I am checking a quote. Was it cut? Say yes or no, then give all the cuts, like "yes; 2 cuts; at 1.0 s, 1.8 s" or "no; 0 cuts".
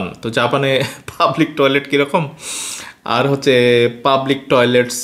no; 0 cuts